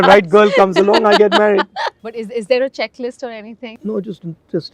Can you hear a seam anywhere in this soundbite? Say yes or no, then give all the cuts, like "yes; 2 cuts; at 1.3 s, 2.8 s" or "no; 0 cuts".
yes; 2 cuts; at 1.9 s, 3.6 s